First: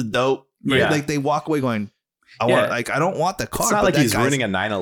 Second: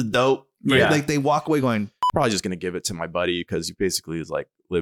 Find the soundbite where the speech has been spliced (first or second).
second